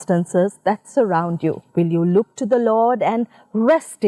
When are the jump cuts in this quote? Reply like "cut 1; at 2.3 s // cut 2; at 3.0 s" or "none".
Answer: cut 1; at 1.6 s

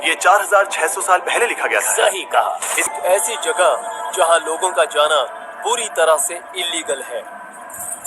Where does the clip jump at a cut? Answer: cut 1; at 2.9 s

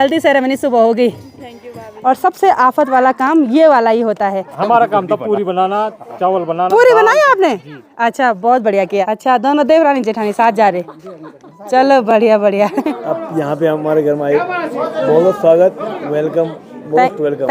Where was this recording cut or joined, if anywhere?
cut 1; at 1.9 s // cut 2; at 4.5 s // cut 3; at 9.1 s // cut 4; at 12.9 s

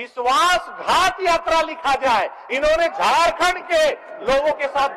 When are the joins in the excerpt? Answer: none

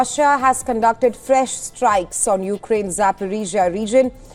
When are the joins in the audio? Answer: none

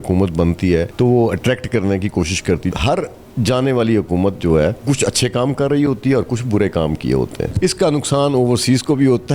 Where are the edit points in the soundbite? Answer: cut 1; at 0.9 s // cut 2; at 2.7 s // cut 3; at 4.8 s // cut 4; at 7.5 s

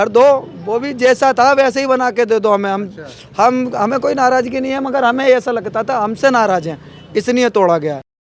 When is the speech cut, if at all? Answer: none

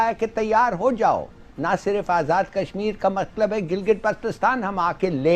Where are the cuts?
none

